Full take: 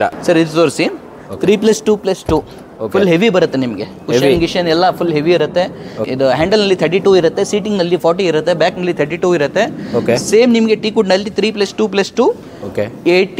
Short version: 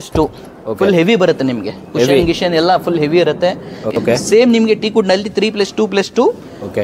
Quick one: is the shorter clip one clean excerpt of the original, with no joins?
no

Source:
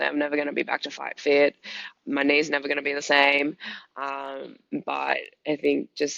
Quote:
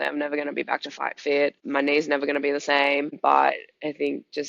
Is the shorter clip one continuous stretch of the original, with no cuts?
no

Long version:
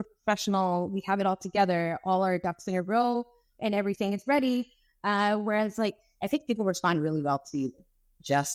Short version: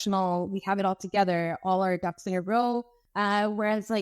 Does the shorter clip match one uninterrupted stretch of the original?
no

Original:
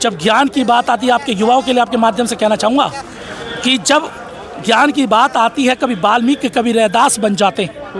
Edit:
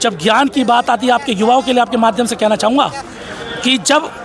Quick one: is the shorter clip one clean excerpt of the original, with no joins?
yes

